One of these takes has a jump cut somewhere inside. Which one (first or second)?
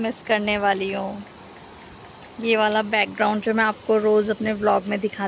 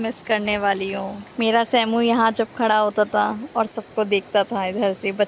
second